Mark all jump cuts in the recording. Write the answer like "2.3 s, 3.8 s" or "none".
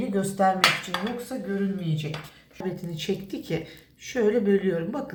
none